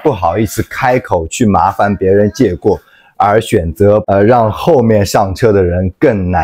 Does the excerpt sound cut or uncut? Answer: uncut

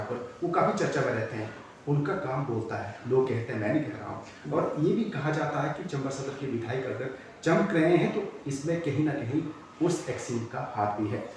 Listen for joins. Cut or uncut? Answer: uncut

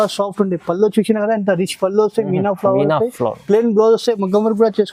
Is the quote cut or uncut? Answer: uncut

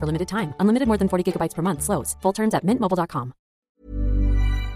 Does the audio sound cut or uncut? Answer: cut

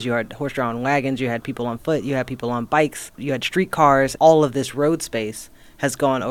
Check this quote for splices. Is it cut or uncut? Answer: cut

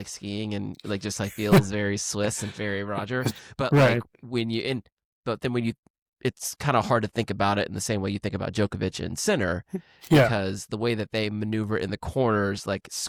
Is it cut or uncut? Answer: uncut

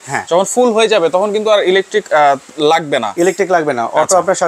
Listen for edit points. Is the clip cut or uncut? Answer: uncut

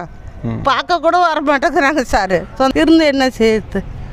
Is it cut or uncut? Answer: cut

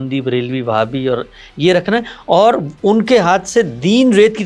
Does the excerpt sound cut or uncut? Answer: uncut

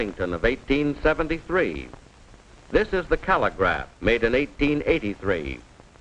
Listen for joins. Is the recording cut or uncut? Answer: cut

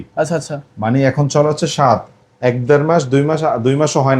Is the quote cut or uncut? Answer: uncut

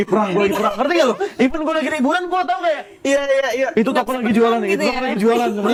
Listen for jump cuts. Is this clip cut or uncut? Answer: uncut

